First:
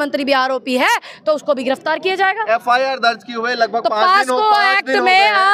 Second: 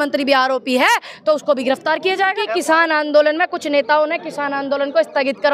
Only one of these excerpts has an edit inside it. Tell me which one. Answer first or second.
second